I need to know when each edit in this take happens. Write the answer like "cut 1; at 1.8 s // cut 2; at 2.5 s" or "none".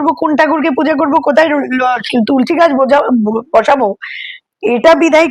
none

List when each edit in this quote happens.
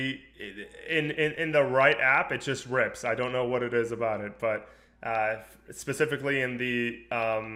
none

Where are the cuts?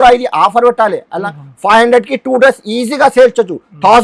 none

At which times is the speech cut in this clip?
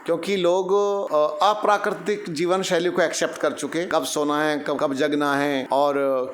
cut 1; at 1.0 s // cut 2; at 3.9 s // cut 3; at 5.1 s

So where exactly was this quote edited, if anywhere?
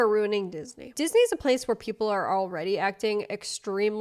cut 1; at 0.9 s

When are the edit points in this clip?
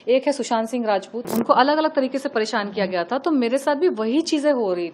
cut 1; at 1.2 s

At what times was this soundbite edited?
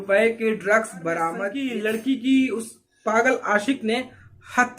cut 1; at 1.6 s

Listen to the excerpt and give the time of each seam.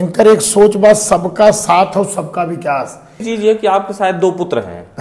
cut 1; at 3.2 s

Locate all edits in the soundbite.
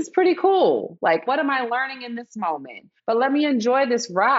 cut 1; at 1.2 s // cut 2; at 2.9 s

